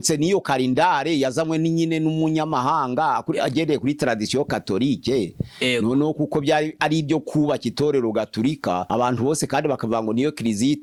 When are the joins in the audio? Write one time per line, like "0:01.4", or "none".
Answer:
none